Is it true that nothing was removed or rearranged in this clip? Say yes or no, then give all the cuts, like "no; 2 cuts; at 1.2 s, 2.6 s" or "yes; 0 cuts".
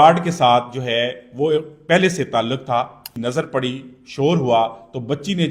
no; 1 cut; at 3.0 s